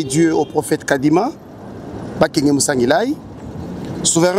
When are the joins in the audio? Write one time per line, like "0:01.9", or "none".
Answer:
none

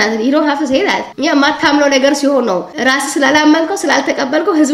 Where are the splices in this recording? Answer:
0:01.1

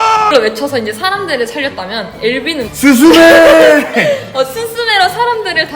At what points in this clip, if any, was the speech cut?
none

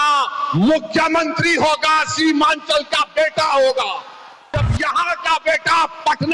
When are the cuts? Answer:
0:04.6

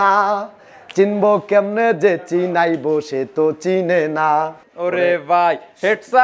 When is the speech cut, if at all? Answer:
0:04.6

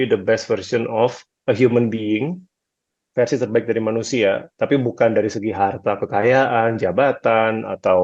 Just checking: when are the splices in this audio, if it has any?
none

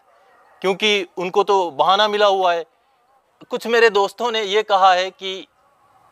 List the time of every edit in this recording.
0:03.2

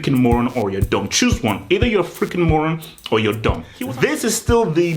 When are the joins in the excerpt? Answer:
0:03.7

